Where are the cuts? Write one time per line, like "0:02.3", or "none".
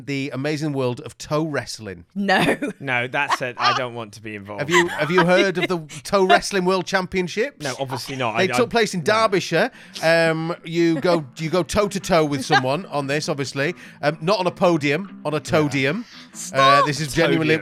none